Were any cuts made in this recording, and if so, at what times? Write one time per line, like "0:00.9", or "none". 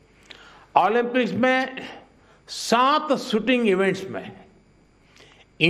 none